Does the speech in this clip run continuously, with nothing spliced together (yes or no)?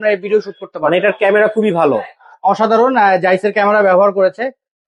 yes